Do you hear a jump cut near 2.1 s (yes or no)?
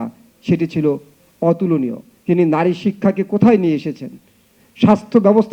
yes